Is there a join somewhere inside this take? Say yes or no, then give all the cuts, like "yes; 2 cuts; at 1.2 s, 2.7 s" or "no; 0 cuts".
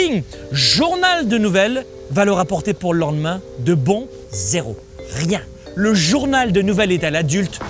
yes; 3 cuts; at 1.9 s, 4.1 s, 5.6 s